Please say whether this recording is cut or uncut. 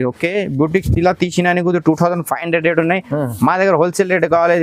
uncut